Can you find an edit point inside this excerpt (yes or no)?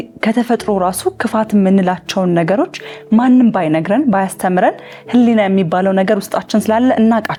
no